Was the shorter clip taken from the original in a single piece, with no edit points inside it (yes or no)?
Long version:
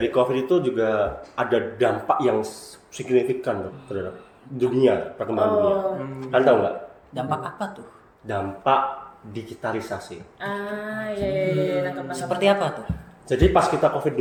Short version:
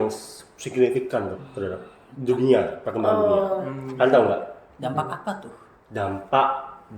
yes